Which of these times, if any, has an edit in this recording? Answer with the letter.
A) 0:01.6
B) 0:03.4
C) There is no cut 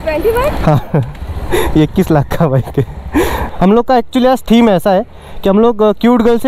B